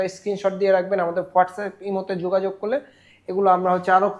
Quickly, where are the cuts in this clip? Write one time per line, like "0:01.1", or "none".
none